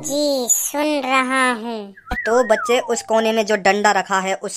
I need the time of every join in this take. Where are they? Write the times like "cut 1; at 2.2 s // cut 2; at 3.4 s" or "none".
cut 1; at 1.9 s

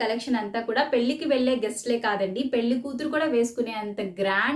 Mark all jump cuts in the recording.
none

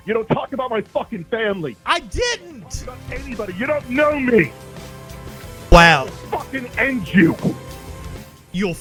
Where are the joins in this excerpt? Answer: none

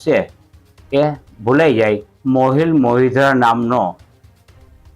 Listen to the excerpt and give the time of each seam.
cut 1; at 2.1 s

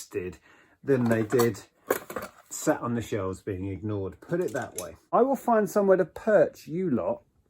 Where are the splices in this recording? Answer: cut 1; at 5.0 s

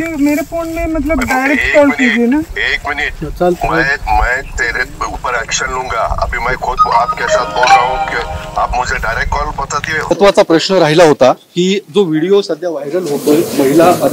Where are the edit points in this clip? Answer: cut 1; at 10.0 s

